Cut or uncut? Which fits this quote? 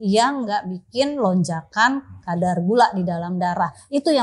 uncut